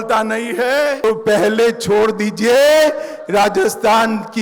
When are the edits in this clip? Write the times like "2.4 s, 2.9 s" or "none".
1.0 s

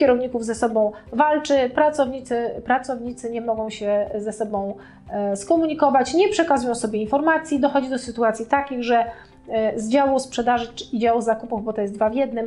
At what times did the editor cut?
none

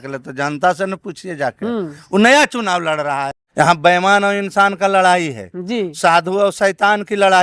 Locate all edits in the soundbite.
3.4 s

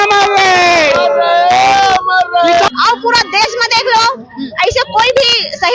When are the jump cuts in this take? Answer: 2.7 s

